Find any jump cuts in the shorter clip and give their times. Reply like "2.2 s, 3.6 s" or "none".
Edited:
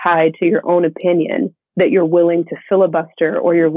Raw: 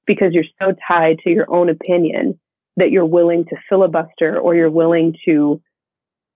1.6 s